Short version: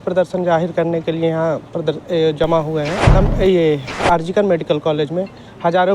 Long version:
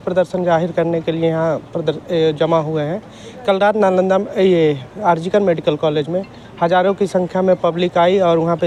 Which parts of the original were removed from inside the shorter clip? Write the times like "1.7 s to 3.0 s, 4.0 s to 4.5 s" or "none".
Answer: 3.1 s to 4.1 s